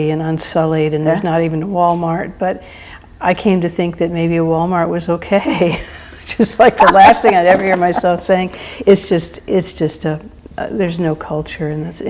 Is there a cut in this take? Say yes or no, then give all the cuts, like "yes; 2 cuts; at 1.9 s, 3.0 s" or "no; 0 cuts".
yes; 1 cut; at 10.5 s